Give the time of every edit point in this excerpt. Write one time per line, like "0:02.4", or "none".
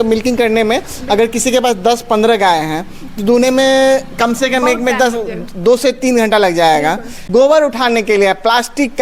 0:07.1